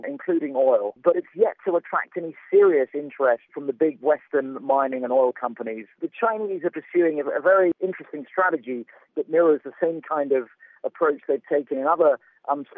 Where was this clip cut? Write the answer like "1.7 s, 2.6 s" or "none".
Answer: 5.8 s, 7.7 s, 9.0 s